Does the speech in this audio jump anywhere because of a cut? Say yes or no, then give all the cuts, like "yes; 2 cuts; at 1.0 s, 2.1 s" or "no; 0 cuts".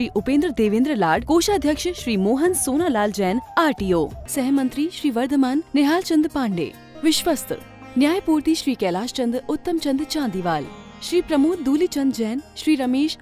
no; 0 cuts